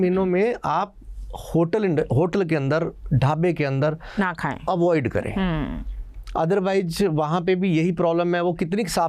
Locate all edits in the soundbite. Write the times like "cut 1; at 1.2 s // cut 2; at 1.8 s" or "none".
none